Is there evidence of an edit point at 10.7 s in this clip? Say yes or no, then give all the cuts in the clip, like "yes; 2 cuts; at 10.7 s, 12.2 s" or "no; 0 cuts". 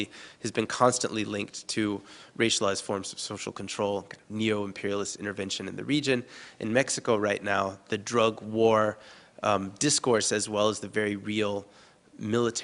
yes; 1 cut; at 10.7 s